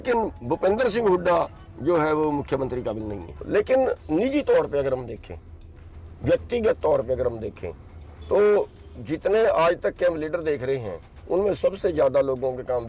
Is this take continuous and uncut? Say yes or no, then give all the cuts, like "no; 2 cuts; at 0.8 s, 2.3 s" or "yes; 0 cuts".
no; 1 cut; at 3.4 s